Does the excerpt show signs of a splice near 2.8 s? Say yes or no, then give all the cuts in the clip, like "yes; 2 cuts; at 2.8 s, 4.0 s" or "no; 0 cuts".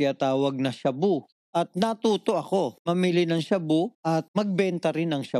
yes; 3 cuts; at 1.4 s, 2.8 s, 4.2 s